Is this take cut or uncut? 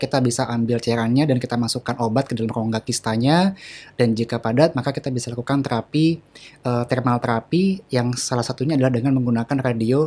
uncut